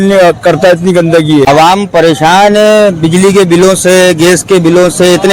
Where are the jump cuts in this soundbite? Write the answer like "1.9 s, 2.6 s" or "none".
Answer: 1.5 s

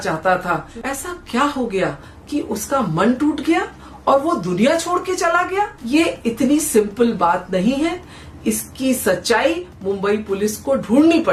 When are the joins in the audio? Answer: none

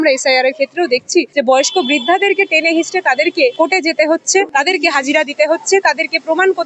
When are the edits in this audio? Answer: 1.3 s, 3.5 s, 4.5 s

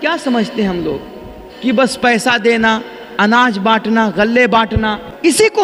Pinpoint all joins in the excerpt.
none

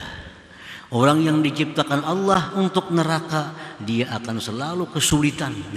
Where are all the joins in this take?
none

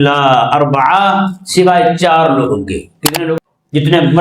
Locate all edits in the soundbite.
3.2 s

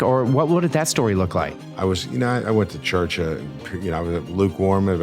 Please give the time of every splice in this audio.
1.3 s

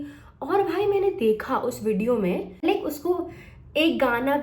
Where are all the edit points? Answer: 2.6 s

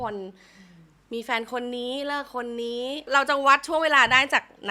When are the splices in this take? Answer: 3.1 s

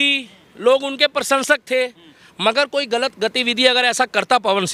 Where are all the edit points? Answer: none

